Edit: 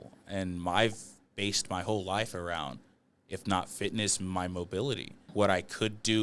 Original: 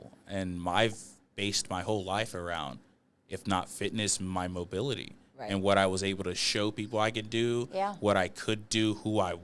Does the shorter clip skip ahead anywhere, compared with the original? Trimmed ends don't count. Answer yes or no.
yes